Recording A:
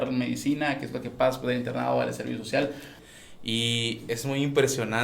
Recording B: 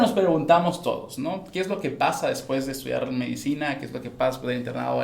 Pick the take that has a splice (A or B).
A